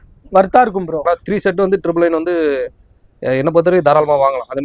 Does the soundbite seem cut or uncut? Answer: cut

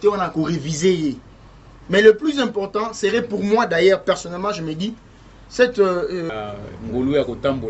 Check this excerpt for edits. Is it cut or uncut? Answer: cut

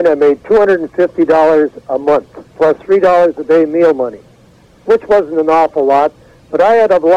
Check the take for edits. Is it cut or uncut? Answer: uncut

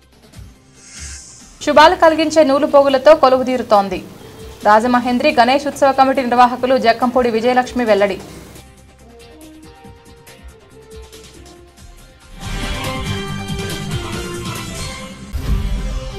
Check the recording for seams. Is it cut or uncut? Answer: uncut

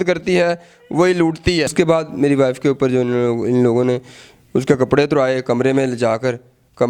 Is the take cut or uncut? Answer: cut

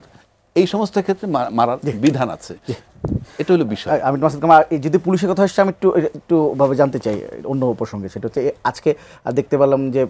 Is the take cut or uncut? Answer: uncut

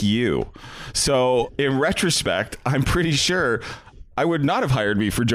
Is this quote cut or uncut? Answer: cut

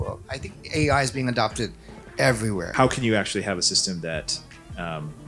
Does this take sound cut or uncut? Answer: cut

